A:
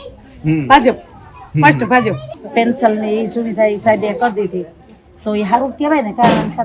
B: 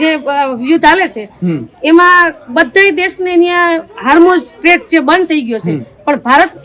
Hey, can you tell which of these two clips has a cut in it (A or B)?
A